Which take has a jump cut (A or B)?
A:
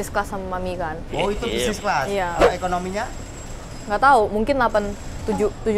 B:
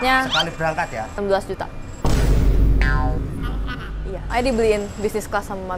B